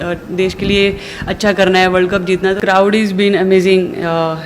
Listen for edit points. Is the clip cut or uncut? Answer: cut